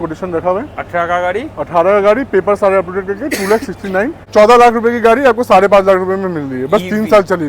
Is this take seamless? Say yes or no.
no